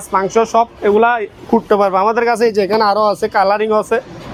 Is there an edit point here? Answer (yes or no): no